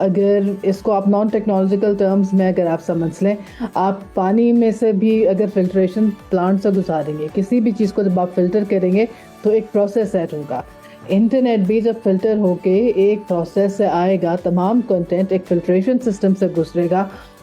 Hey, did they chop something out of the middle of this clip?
no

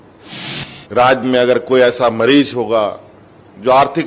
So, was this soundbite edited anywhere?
no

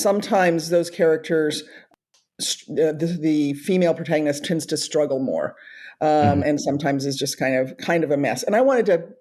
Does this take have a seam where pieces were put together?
yes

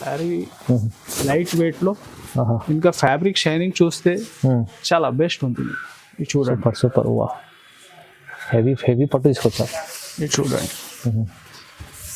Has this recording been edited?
no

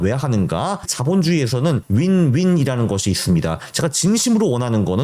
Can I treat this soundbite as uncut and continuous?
no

